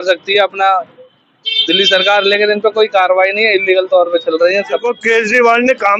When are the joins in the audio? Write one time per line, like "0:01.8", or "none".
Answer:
0:04.9